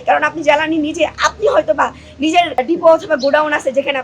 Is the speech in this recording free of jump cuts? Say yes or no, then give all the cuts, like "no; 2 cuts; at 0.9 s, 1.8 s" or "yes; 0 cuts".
no; 1 cut; at 2.6 s